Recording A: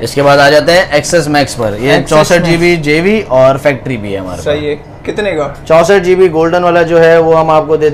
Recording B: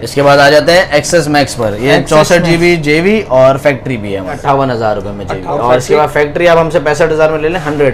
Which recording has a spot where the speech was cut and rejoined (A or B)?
B